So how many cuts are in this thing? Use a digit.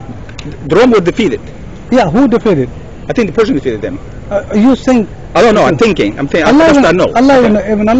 0